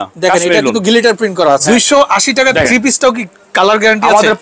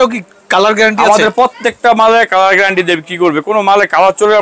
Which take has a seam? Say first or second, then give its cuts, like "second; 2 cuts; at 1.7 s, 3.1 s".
first; 1 cut; at 1.6 s